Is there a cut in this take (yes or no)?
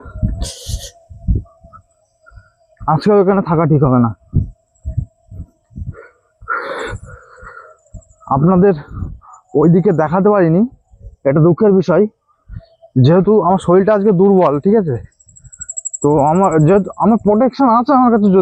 no